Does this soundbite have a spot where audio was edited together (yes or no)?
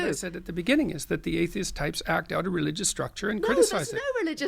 no